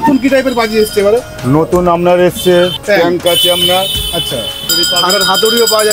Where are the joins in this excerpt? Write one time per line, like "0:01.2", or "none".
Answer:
0:02.8
0:04.8